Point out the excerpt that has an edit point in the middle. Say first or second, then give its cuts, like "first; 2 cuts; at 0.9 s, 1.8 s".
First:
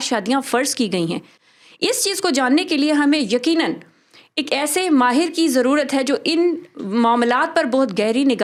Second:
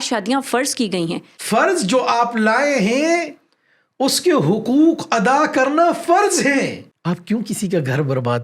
second; 2 cuts; at 1.3 s, 6.8 s